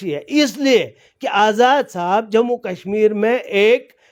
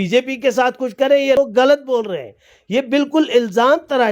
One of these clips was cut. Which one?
second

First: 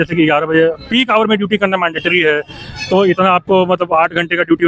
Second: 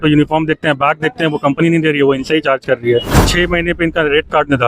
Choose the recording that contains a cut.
second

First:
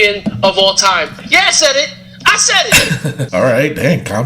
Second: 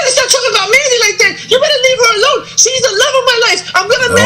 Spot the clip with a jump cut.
first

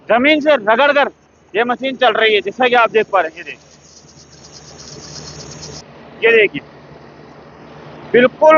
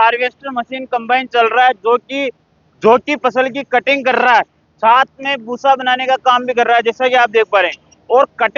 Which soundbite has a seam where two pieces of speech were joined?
first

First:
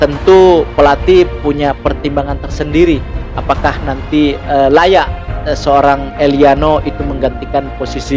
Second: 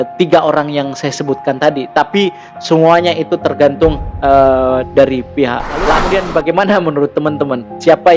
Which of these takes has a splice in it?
second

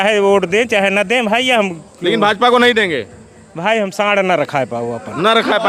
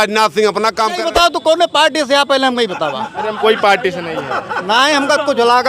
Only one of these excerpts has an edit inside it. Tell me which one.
second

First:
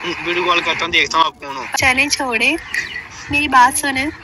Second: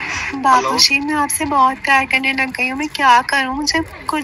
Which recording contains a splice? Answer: first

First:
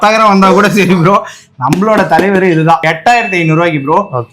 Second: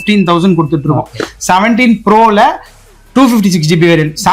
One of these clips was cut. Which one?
first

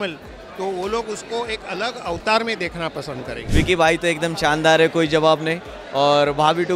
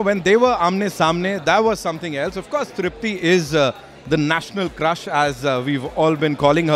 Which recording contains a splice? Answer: first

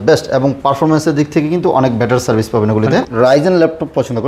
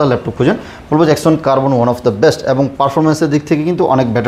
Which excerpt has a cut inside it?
first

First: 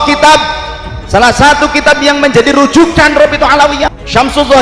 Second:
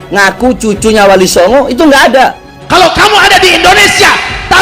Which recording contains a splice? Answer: second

